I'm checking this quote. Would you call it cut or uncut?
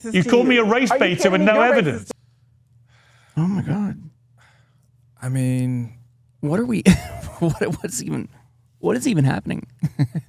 uncut